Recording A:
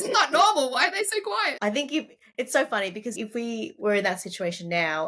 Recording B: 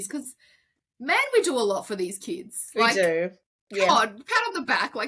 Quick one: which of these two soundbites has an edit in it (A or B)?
A